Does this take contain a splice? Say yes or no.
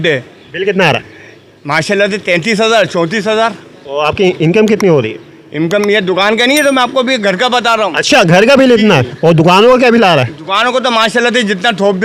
no